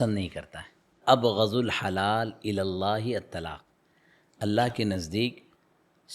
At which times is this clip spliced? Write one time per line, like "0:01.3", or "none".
0:01.0